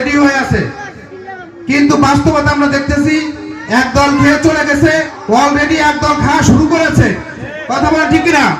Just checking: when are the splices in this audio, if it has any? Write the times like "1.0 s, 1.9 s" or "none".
5.1 s